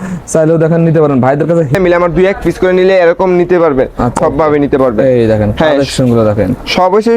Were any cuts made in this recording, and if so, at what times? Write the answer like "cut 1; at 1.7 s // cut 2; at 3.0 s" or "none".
cut 1; at 1.7 s // cut 2; at 4.1 s